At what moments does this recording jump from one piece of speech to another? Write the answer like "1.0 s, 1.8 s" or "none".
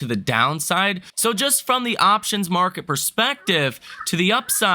1.1 s